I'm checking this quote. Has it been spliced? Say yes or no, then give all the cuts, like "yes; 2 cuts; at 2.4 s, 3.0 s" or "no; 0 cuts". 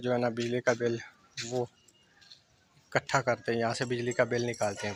no; 0 cuts